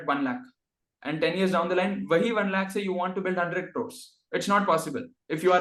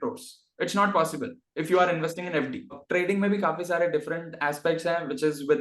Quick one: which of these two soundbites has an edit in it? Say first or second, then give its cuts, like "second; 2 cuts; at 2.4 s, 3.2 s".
second; 1 cut; at 2.8 s